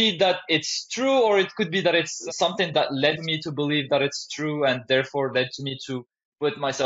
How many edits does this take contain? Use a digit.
2